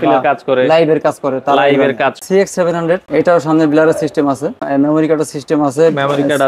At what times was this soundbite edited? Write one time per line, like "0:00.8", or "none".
0:02.2
0:03.1
0:04.6